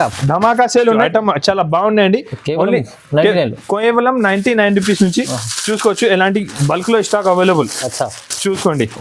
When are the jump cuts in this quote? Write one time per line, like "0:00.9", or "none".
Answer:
0:01.0